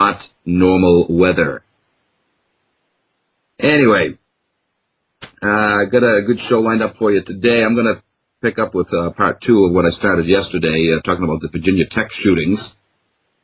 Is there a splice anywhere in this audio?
no; 0 cuts

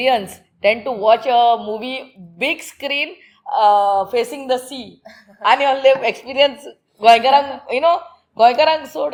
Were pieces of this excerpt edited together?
no; 0 cuts

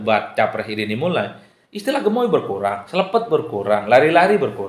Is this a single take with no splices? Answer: yes; 0 cuts

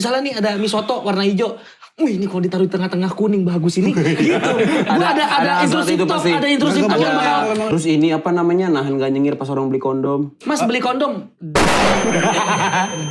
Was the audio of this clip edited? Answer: yes; 2 cuts; at 7.7 s, 10.4 s

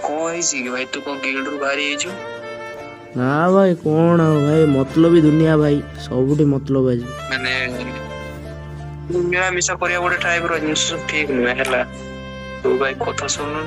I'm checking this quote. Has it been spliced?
yes; 1 cut; at 7.1 s

